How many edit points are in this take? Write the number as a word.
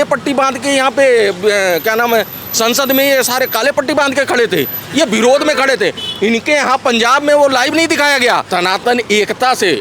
one